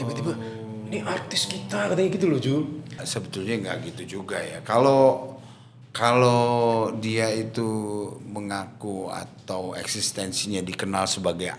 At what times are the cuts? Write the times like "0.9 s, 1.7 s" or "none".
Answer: 3.0 s